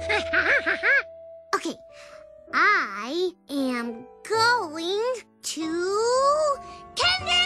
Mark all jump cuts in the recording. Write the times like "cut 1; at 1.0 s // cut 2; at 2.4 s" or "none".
none